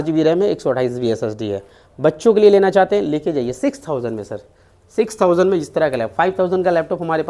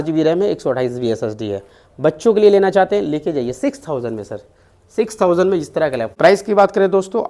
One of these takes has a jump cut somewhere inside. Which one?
second; 1 cut; at 6.0 s

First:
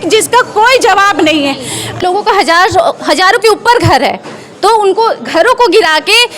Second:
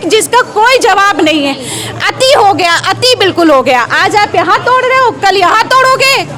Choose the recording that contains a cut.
first; 1 cut; at 2.0 s

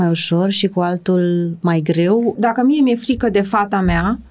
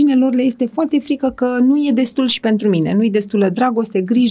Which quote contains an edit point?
first; 1 cut; at 2.4 s

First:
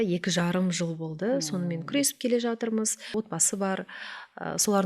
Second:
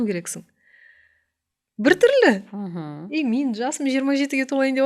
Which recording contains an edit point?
first; 1 cut; at 3.1 s

